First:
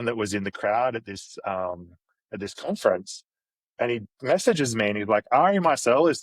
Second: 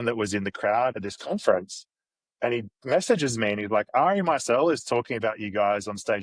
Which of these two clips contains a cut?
second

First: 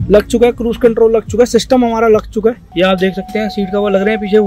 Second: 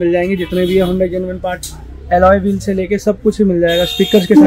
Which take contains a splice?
first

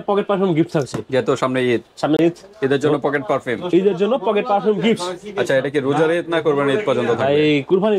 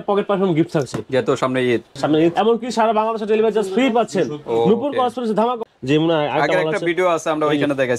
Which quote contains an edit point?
second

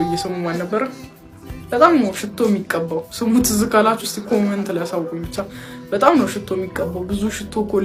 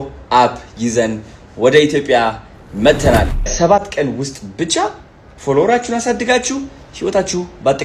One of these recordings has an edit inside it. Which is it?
second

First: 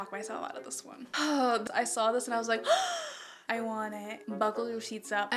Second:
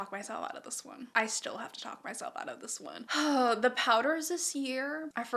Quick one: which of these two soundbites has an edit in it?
first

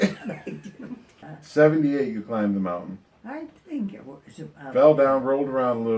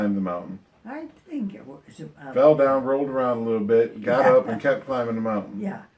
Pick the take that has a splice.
first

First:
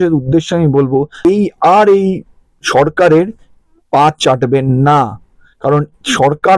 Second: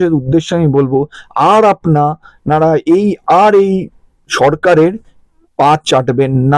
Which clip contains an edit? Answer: first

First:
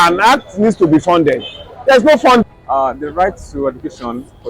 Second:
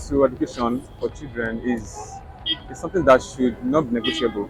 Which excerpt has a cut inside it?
first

